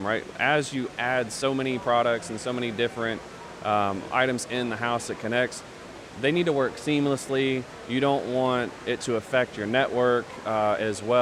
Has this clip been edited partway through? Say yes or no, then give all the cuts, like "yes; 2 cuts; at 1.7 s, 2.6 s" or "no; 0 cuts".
no; 0 cuts